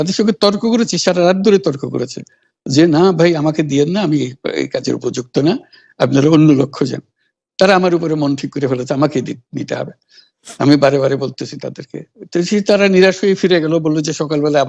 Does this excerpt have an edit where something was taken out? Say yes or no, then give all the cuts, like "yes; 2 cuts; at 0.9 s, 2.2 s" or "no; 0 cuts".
no; 0 cuts